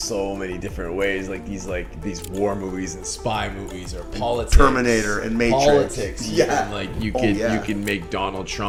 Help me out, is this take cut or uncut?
uncut